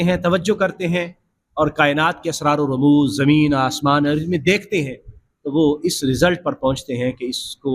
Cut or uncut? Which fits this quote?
uncut